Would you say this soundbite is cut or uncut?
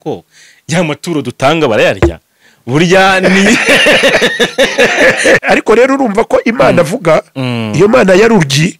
cut